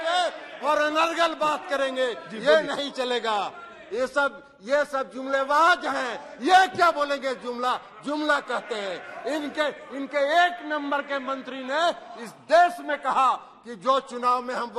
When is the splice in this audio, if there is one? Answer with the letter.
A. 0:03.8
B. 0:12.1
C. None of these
C